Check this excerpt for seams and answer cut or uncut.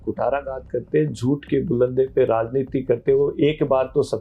uncut